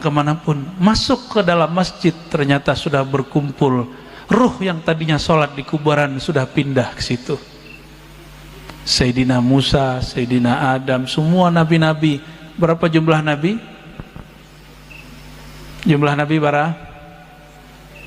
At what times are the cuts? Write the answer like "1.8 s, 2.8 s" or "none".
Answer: none